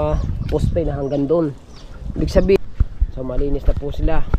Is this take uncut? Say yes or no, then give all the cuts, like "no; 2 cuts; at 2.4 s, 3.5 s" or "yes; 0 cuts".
no; 1 cut; at 2.6 s